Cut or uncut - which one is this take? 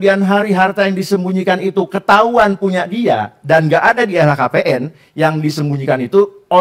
uncut